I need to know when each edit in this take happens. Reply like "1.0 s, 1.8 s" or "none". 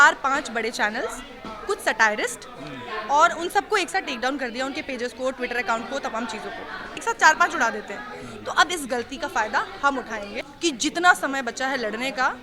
7.0 s, 10.4 s